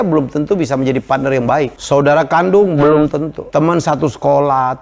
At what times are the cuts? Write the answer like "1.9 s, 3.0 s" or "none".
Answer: 1.8 s, 3.4 s